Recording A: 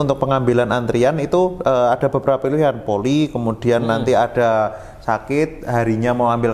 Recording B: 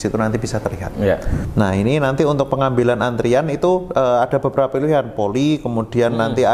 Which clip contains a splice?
B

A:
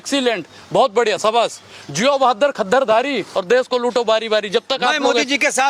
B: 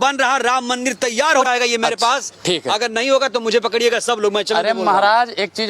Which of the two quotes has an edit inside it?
B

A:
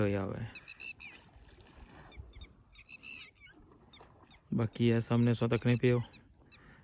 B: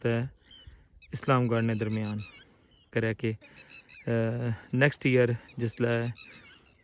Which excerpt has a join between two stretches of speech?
B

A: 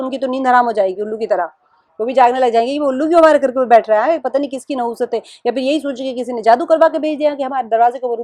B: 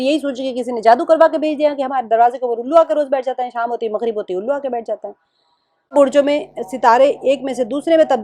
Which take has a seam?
B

